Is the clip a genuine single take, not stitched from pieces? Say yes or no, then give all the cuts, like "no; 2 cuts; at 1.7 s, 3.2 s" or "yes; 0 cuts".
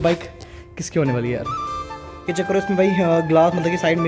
no; 1 cut; at 2.1 s